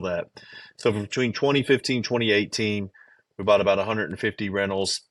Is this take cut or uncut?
uncut